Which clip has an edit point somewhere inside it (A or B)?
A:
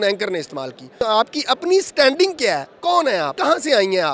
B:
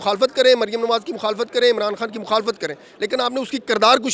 A